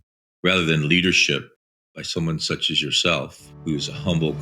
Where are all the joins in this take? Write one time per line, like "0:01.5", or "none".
0:03.4